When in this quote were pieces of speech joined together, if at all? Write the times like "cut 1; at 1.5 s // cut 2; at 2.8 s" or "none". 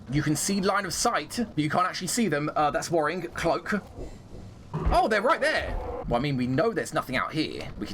cut 1; at 4.7 s // cut 2; at 5.9 s